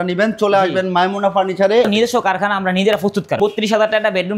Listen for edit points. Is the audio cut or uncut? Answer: cut